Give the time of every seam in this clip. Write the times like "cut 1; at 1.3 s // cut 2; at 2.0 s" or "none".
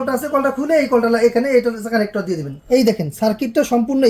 cut 1; at 2.5 s